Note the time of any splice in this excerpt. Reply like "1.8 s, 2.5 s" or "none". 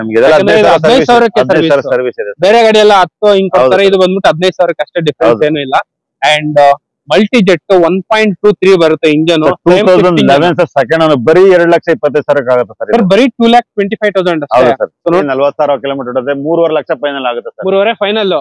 15.2 s